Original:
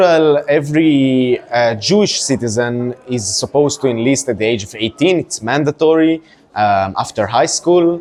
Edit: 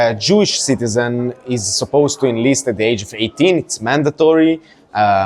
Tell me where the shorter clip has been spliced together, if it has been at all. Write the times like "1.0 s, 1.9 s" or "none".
none